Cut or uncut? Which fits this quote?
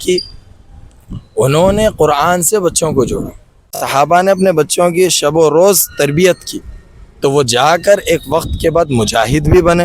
cut